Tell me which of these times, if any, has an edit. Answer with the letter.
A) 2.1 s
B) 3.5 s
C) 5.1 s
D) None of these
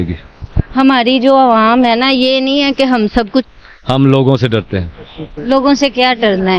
B